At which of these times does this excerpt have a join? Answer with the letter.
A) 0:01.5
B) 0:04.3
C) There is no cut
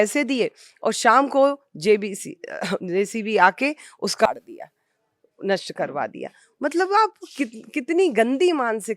B